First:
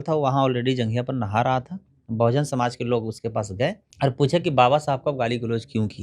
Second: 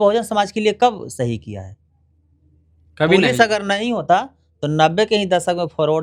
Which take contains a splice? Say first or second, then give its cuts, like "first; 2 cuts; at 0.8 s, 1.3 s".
first; 1 cut; at 3.9 s